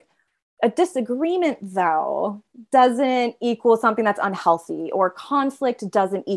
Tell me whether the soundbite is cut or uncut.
uncut